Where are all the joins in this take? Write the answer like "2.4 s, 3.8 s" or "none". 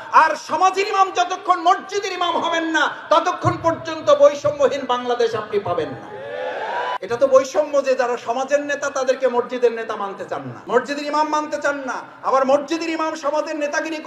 7.0 s, 10.5 s